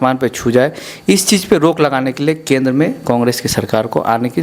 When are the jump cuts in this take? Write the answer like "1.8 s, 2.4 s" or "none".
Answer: none